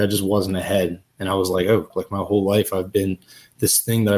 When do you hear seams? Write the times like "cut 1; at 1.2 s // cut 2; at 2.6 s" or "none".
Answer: cut 1; at 1.9 s